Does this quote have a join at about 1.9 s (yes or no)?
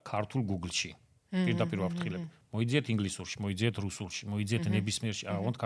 no